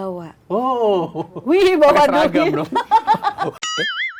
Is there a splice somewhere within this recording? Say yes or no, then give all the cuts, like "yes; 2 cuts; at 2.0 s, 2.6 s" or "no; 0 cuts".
no; 0 cuts